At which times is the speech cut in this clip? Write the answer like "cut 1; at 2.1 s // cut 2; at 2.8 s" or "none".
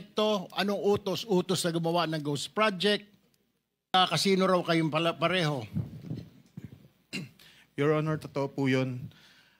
cut 1; at 3.9 s